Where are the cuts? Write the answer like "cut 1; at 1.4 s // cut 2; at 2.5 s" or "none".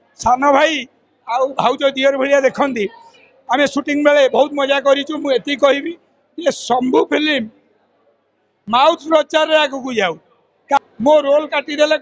cut 1; at 10.8 s